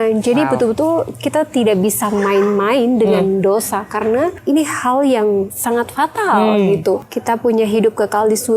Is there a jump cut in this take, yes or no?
yes